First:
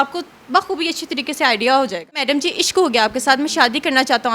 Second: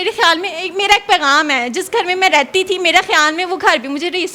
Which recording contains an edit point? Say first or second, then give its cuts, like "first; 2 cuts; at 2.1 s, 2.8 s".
first; 1 cut; at 2.2 s